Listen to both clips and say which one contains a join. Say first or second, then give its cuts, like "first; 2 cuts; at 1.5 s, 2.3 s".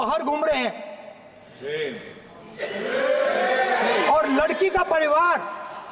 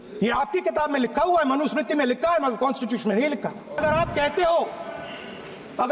second; 1 cut; at 3.8 s